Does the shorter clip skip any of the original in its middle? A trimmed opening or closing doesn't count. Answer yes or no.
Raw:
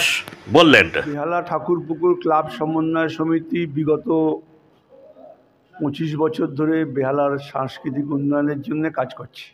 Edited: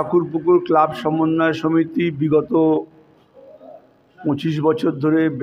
no